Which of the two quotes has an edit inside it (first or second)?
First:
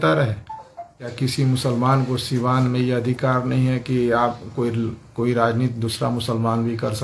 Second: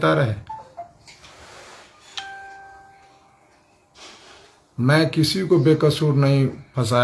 first